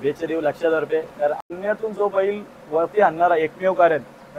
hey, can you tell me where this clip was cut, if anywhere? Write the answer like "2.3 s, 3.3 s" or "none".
1.4 s